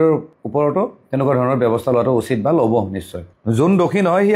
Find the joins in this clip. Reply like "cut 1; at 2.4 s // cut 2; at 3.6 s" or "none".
cut 1; at 3.3 s